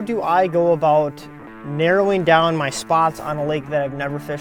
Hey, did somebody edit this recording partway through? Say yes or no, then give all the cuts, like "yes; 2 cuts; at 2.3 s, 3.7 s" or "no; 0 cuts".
no; 0 cuts